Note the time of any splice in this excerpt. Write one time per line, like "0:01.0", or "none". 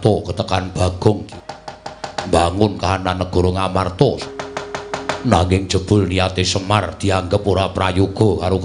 0:01.3
0:04.2